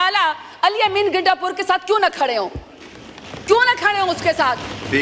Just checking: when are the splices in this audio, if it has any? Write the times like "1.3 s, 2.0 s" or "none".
none